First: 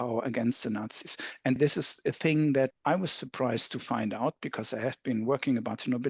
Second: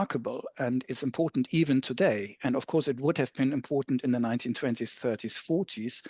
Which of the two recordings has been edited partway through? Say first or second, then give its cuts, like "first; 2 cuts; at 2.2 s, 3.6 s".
first; 2 cuts; at 1.6 s, 2.8 s